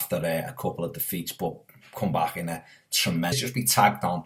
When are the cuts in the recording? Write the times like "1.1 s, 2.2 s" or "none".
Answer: none